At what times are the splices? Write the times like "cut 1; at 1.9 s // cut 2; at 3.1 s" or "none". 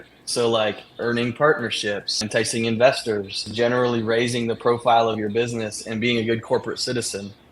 cut 1; at 2.2 s // cut 2; at 3.4 s